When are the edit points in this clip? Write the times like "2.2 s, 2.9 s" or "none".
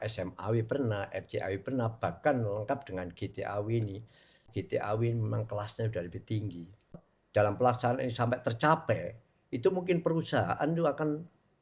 4.6 s, 7.1 s

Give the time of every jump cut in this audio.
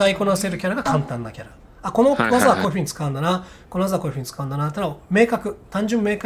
none

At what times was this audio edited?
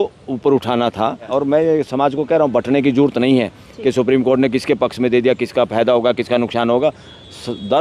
1.3 s

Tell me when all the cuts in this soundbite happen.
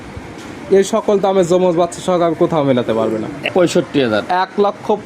3.5 s

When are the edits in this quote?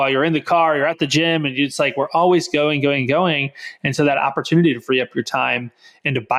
none

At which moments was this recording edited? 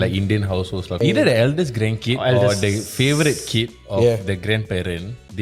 1.0 s

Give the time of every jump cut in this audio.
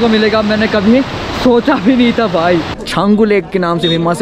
2.8 s

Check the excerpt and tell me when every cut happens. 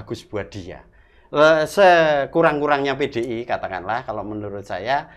none

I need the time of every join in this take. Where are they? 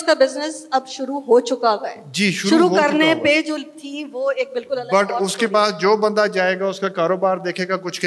none

